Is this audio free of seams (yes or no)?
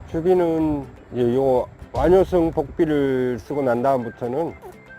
no